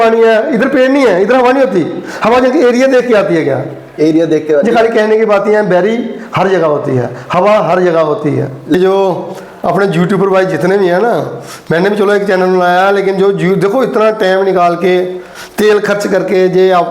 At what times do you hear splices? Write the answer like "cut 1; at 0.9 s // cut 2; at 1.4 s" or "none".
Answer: cut 1; at 8.8 s